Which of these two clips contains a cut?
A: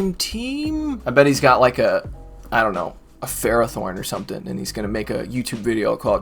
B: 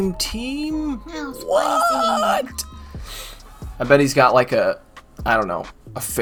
A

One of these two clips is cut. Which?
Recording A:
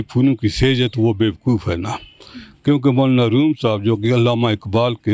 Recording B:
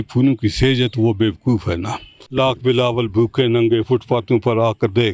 B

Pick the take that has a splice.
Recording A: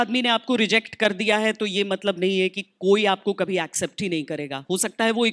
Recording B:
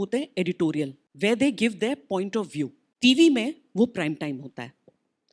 B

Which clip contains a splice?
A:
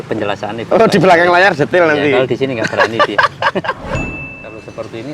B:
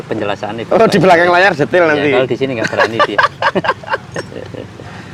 A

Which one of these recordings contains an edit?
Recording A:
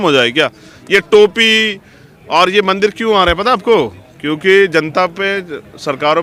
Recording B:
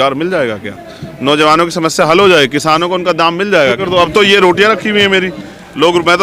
B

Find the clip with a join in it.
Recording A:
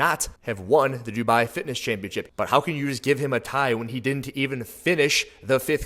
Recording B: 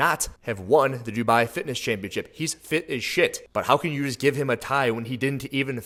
A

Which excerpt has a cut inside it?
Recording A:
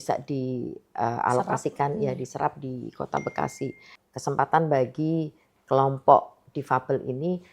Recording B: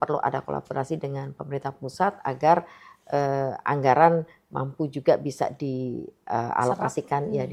A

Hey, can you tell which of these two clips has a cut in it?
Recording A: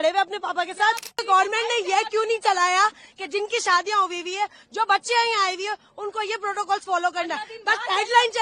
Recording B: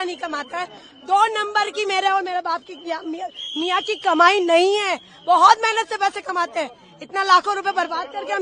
A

